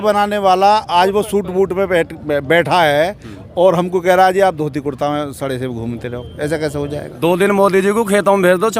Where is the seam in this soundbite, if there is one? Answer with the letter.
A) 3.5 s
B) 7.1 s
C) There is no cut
B